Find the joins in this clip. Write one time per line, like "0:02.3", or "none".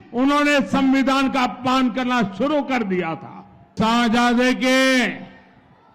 0:03.7